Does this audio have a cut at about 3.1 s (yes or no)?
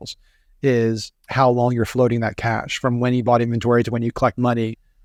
no